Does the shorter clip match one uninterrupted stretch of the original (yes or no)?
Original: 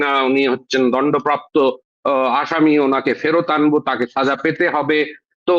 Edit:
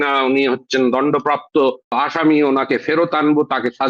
no